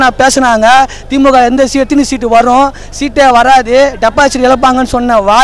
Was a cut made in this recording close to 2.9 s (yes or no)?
no